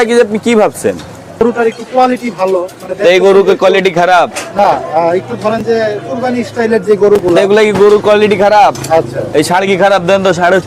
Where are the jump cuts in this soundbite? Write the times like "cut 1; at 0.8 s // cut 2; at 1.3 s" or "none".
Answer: cut 1; at 1.4 s